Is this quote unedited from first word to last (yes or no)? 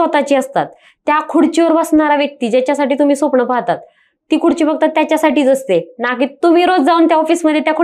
yes